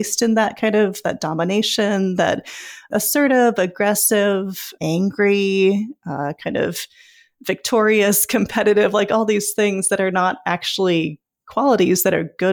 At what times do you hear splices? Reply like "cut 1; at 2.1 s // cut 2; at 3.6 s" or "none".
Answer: cut 1; at 2.9 s // cut 2; at 4.7 s